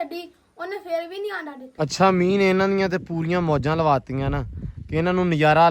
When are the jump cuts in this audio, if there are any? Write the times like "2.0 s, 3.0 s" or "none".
1.6 s